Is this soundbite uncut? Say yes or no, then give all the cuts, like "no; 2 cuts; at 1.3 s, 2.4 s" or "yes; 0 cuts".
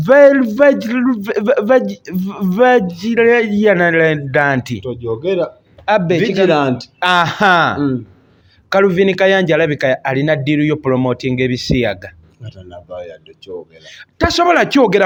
yes; 0 cuts